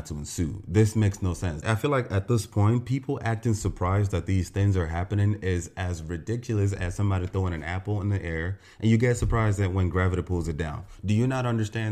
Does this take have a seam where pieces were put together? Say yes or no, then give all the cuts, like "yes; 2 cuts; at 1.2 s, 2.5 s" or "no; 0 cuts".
no; 0 cuts